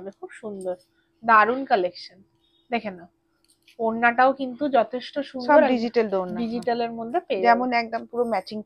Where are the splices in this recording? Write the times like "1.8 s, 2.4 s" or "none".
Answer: none